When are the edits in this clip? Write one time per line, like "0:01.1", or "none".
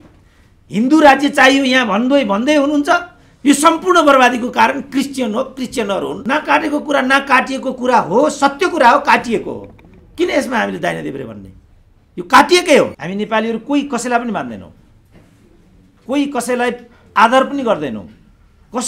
0:06.2
0:13.0